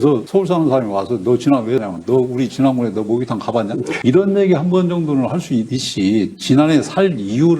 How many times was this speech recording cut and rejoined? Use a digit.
1